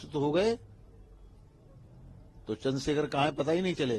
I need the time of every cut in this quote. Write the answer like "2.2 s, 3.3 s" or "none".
none